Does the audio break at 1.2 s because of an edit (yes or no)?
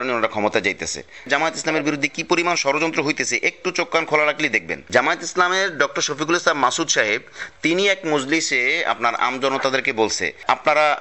yes